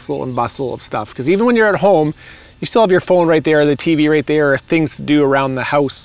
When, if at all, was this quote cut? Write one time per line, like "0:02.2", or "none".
none